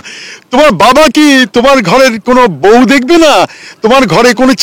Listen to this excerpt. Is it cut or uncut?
uncut